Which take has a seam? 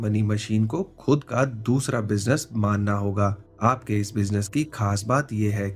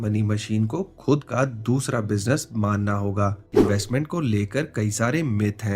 second; 1 cut; at 3.5 s

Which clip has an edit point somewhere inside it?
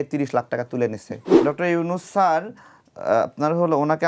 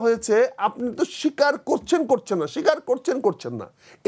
first; 1 cut; at 1.3 s

